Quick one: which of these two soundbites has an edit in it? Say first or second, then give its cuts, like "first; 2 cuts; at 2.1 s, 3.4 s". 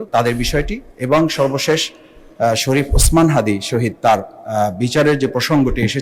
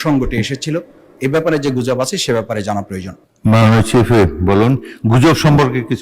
second; 1 cut; at 3.3 s